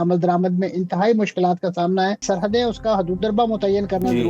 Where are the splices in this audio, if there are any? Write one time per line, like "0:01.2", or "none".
0:02.2